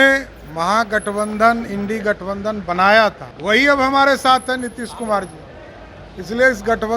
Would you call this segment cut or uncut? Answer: cut